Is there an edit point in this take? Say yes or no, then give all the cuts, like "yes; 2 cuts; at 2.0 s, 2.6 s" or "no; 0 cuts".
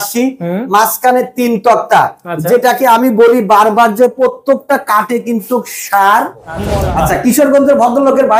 yes; 1 cut; at 6.6 s